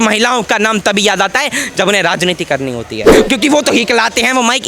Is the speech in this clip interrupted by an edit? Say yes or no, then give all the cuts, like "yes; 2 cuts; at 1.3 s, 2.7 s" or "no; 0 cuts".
yes; 1 cut; at 3.1 s